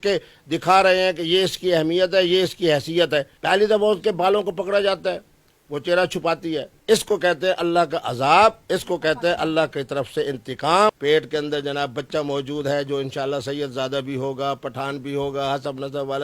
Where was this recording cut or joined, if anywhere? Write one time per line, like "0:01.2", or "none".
0:03.3
0:06.7
0:11.0